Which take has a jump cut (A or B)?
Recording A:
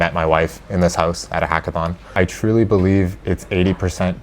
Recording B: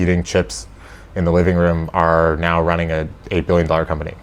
A